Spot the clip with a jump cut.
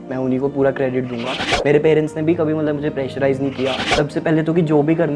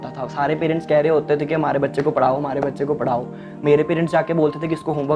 first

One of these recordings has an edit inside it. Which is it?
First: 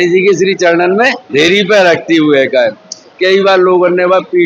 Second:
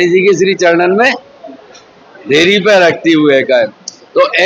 first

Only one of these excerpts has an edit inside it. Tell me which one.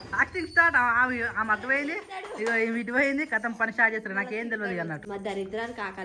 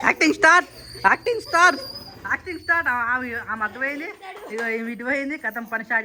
first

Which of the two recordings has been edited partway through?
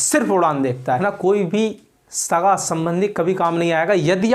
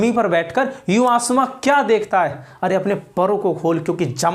first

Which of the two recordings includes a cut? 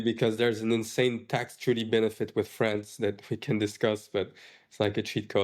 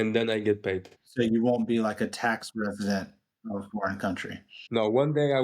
second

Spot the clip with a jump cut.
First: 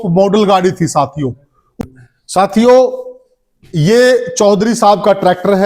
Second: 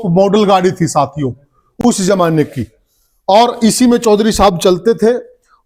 first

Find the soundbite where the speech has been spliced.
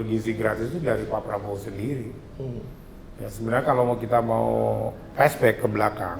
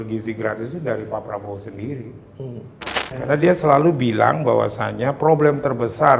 second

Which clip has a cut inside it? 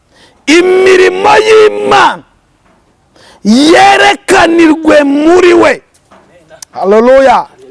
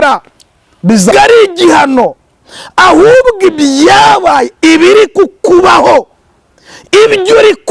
second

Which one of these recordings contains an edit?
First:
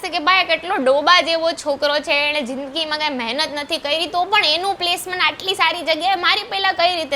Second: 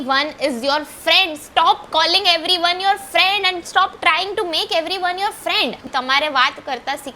second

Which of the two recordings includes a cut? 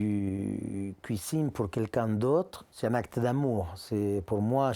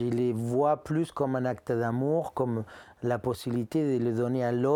first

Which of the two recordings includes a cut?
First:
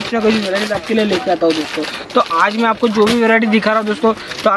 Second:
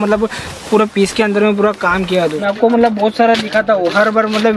second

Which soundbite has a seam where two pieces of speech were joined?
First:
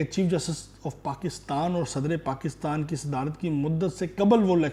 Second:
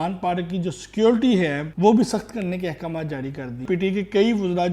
second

